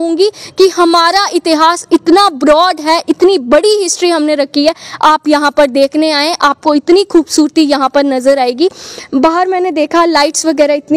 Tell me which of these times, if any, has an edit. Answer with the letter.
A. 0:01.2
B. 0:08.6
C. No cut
C